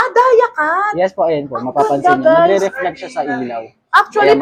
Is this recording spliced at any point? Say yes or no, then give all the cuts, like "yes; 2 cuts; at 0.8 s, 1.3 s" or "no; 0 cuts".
no; 0 cuts